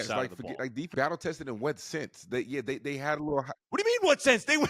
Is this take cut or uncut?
cut